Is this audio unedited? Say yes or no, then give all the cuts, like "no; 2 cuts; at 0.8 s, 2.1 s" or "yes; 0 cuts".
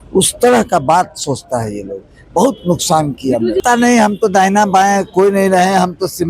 yes; 0 cuts